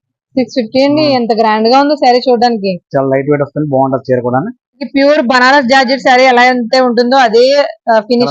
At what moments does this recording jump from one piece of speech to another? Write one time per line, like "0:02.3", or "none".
0:04.8

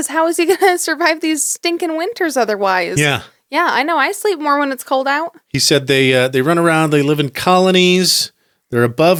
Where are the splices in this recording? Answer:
none

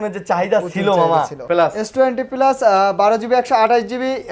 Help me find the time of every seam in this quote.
0:01.4

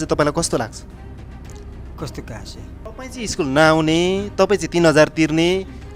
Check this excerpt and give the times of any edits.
0:02.8

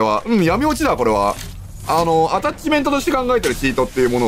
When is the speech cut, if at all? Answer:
none

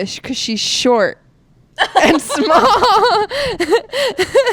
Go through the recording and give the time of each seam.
none

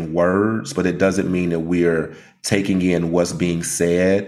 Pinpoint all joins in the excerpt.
none

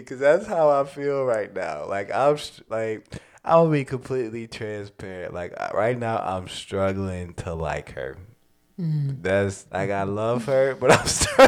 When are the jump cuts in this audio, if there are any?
0:09.6

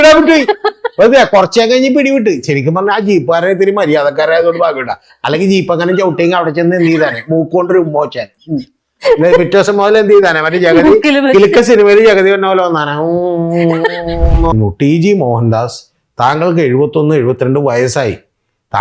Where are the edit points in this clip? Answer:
0:14.5

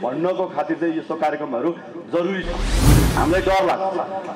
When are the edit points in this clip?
0:02.9

